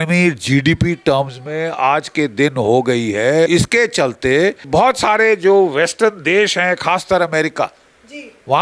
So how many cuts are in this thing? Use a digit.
2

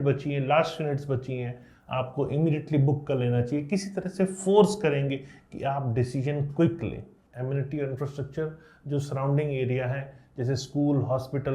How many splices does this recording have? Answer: 1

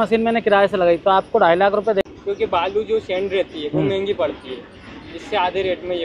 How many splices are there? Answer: 1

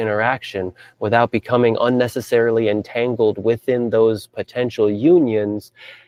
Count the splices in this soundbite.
0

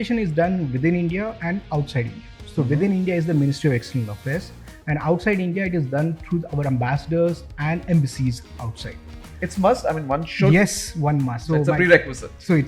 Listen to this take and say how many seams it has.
2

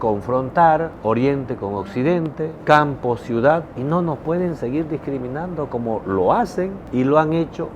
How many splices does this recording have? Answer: 4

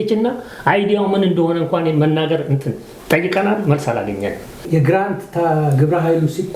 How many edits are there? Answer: 1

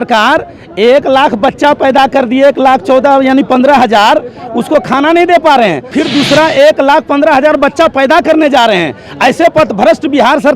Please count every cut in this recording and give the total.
1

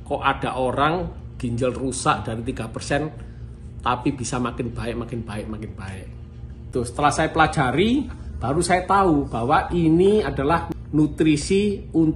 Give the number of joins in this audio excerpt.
2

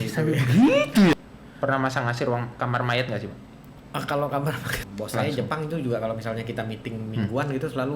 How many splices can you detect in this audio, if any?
2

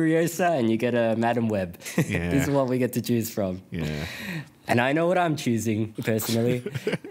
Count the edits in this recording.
1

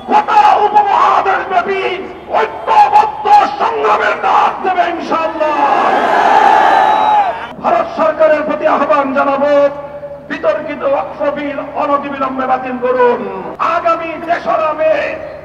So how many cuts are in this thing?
2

